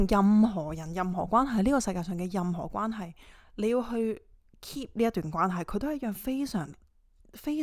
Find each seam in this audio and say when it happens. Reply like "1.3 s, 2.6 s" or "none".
none